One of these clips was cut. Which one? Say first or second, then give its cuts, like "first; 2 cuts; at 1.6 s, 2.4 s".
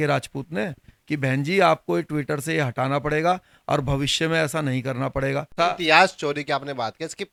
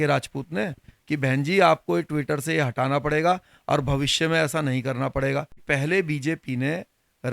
second; 1 cut; at 5.5 s